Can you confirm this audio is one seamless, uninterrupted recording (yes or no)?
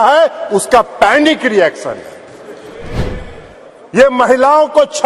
no